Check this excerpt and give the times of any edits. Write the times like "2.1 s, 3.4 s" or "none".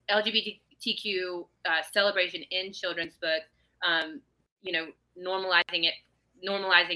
none